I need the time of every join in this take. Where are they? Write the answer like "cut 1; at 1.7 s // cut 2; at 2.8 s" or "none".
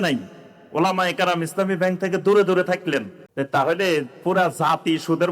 cut 1; at 3.2 s